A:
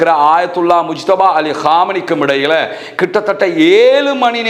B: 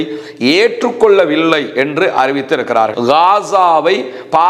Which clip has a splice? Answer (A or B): B